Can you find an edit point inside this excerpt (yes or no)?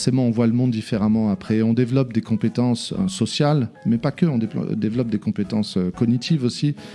no